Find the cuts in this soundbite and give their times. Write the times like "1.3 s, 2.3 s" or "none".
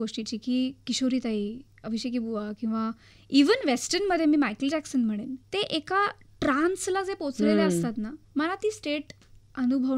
5.4 s, 8.2 s